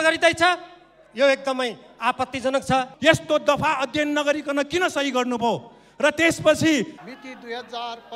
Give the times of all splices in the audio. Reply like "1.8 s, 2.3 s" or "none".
2.9 s, 7.0 s

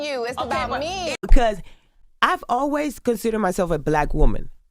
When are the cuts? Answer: 1.2 s

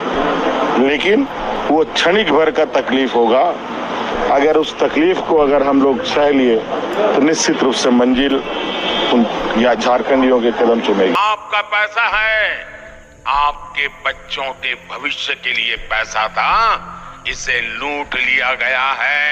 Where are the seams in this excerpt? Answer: 11.1 s

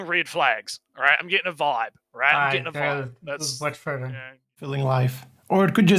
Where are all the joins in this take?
4.7 s

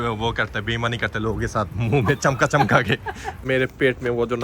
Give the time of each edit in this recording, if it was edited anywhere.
3.4 s

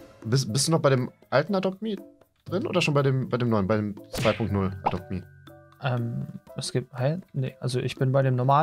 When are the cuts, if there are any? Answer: none

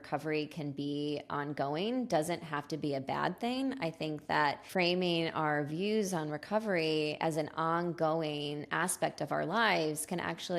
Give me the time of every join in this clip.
4.6 s

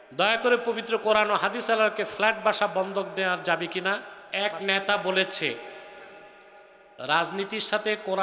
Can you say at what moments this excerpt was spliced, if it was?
4.2 s

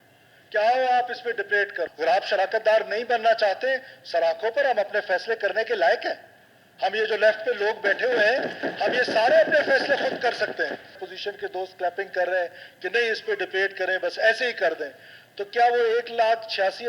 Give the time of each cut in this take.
1.8 s, 11.0 s

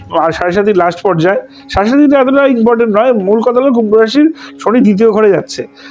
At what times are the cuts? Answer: none

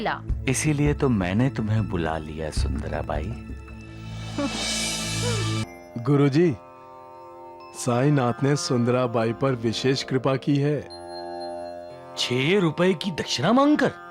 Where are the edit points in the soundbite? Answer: 5.6 s

